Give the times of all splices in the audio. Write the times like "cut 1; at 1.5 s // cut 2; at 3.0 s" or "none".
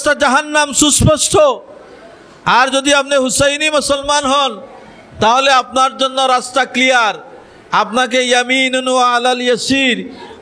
none